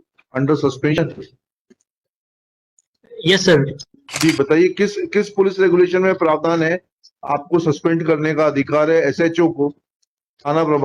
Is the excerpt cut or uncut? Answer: cut